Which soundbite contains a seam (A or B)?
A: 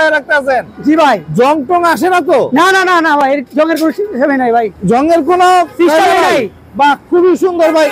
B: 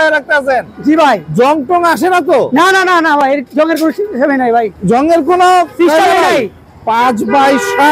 B